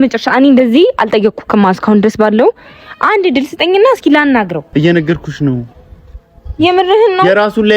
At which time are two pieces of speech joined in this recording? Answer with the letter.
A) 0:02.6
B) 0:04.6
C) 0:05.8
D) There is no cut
B